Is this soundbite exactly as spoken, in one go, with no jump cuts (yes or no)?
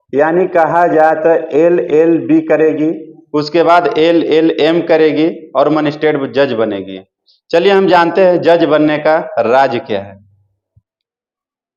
yes